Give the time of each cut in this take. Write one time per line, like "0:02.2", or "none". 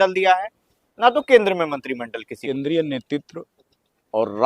0:02.4